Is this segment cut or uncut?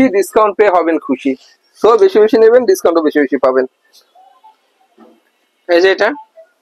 uncut